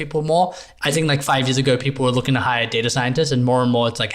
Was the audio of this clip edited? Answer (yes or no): no